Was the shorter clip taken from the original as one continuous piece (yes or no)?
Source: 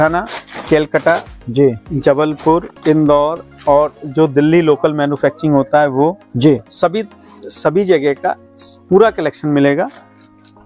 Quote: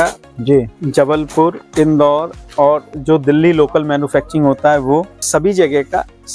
no